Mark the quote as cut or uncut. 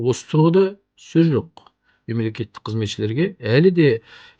uncut